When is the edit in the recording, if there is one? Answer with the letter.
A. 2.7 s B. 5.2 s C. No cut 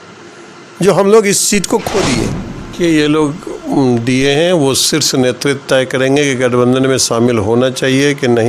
A